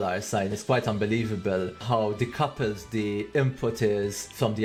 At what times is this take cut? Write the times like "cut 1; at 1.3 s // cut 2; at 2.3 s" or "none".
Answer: none